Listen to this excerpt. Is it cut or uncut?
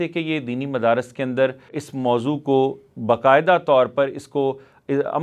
cut